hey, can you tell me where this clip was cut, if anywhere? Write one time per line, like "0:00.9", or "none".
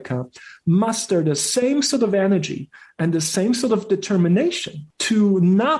none